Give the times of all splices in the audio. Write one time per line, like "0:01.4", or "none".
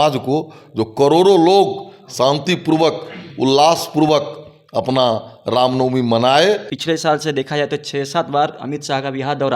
0:06.7